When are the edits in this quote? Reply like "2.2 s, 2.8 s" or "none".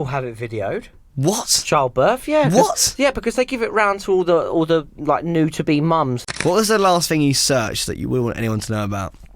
1.0 s, 6.3 s